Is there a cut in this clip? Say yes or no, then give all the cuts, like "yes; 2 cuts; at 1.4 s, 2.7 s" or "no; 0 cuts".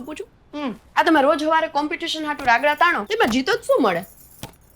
yes; 2 cuts; at 0.8 s, 3.0 s